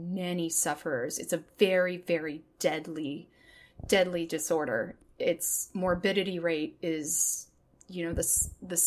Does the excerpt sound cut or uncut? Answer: uncut